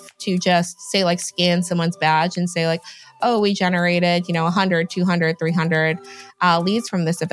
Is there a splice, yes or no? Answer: no